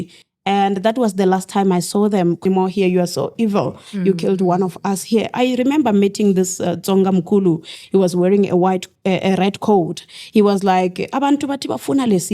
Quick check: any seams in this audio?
yes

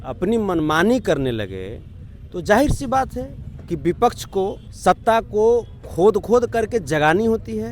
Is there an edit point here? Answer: yes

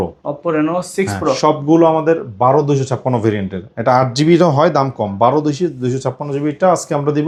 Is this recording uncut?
yes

